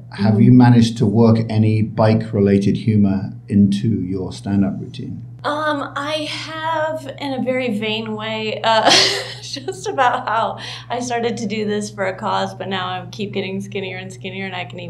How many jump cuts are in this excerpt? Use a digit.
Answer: 1